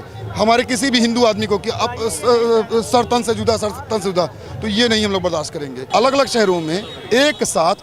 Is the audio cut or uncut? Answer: cut